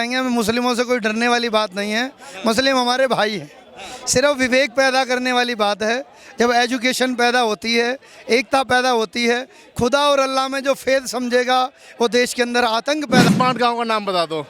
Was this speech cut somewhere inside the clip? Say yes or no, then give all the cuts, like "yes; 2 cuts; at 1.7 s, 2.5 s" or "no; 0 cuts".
yes; 1 cut; at 13.3 s